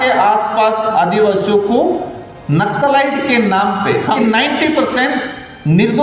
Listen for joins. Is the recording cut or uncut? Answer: cut